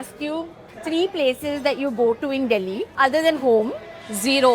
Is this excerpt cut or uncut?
cut